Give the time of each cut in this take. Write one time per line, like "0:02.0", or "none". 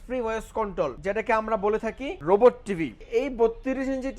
0:01.0
0:02.1
0:03.0